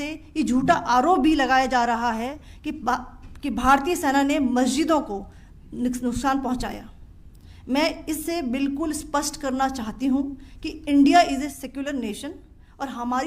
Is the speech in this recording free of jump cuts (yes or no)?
yes